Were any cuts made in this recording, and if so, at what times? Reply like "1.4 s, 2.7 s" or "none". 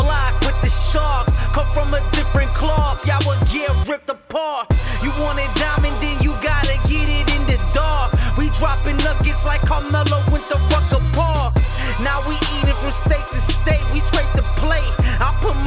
none